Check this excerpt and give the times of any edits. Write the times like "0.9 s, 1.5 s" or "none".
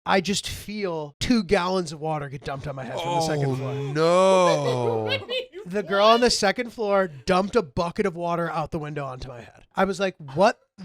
1.1 s, 9.7 s